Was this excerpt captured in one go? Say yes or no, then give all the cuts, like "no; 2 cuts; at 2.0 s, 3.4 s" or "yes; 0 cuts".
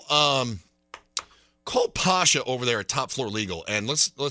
yes; 0 cuts